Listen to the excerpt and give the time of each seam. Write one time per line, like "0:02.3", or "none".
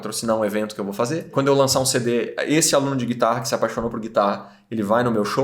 0:01.3